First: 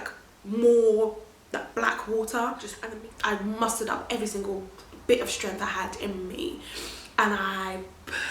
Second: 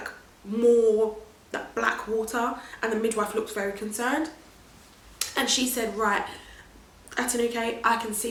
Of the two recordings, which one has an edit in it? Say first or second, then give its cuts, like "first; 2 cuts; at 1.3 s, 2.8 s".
first; 1 cut; at 2.7 s